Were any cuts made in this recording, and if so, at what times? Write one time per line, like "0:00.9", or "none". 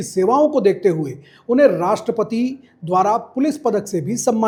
none